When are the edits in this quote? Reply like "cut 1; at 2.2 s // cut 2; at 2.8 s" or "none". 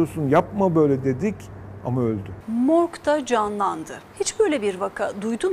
cut 1; at 2.3 s // cut 2; at 4.0 s